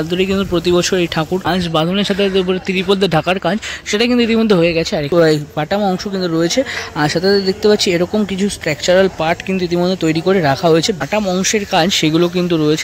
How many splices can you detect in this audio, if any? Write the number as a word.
three